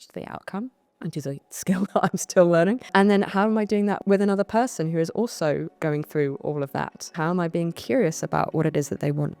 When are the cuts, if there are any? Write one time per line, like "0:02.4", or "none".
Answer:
0:00.9
0:02.8
0:04.0
0:05.7
0:07.1